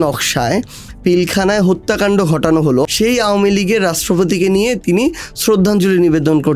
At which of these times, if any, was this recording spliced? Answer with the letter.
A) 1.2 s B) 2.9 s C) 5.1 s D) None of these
B